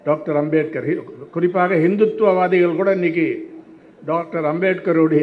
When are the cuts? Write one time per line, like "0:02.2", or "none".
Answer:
none